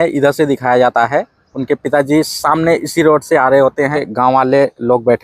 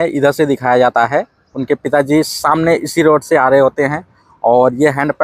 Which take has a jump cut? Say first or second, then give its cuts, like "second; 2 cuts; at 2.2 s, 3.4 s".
first; 1 cut; at 4.1 s